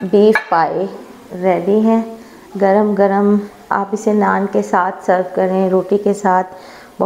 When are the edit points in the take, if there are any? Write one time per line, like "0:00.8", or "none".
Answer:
none

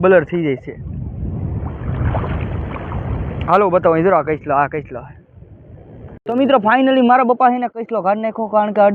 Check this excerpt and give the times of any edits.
0:06.2

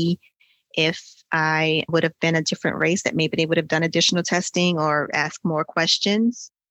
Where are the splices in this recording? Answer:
0:01.9

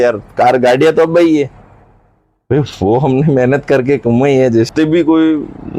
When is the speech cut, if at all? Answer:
0:04.7

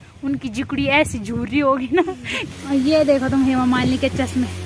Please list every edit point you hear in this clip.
0:02.4

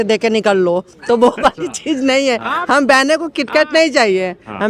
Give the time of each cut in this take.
none

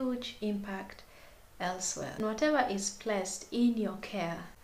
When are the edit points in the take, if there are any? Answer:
0:02.0

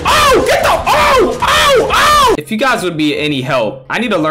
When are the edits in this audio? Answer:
0:02.4

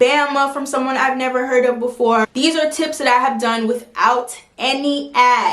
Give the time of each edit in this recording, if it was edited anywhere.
0:02.2

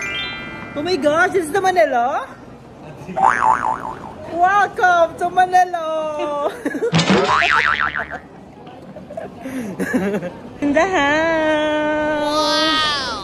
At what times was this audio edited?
0:10.4

